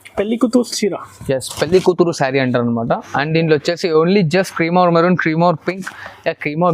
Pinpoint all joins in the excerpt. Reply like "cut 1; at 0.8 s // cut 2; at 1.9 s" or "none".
none

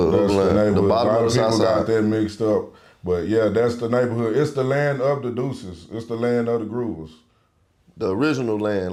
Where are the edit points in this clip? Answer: none

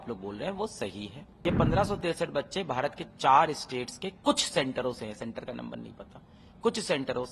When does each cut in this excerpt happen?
cut 1; at 1.2 s

